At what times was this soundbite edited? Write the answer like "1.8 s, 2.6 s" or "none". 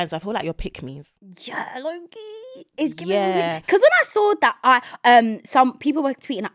none

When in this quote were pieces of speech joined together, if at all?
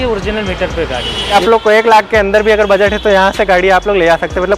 1.3 s

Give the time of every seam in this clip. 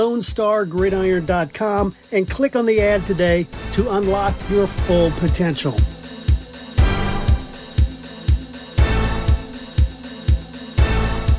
5.8 s

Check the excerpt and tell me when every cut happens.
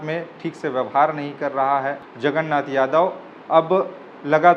2.1 s

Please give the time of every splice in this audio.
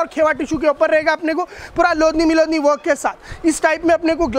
none

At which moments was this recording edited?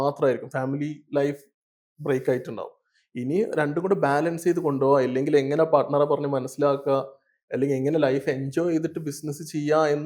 none

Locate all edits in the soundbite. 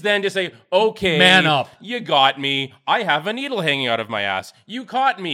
none

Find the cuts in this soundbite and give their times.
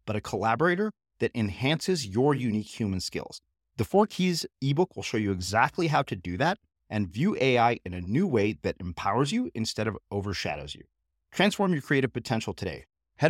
none

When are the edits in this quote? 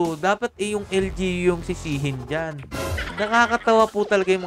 3.1 s

